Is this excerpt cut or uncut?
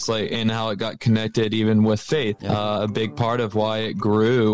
cut